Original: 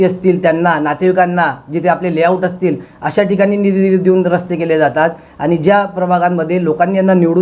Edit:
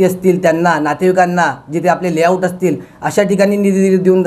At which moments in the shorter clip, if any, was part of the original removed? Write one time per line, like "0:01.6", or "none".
none